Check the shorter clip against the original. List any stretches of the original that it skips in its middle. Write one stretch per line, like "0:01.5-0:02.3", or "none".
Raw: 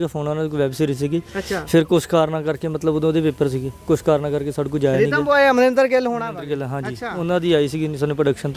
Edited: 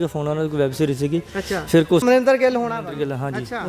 0:02.0-0:05.5

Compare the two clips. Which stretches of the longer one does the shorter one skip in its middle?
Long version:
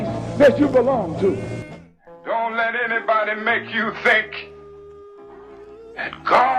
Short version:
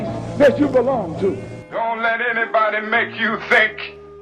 0:01.5-0:02.1

